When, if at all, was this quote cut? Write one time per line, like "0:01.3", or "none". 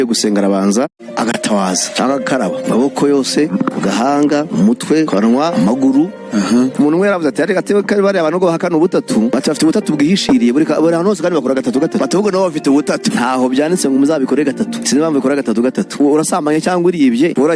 0:01.0